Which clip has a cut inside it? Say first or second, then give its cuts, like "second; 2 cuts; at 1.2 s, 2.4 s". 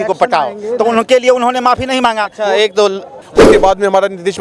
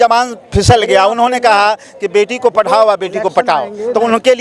first; 1 cut; at 3.3 s